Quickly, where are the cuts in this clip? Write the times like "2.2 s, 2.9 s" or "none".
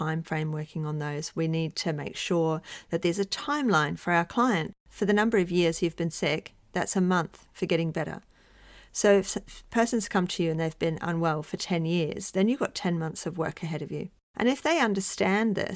4.7 s, 14.2 s